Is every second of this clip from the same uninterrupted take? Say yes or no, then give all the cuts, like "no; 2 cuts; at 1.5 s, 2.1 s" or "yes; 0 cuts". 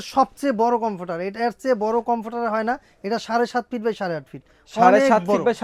yes; 0 cuts